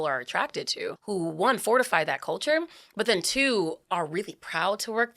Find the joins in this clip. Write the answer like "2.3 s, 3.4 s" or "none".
1.0 s